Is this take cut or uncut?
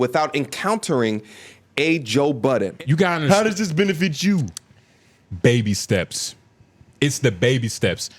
cut